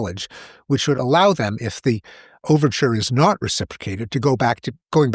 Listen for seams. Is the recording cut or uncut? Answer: cut